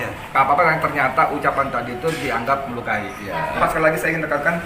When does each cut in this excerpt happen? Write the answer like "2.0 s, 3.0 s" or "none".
3.6 s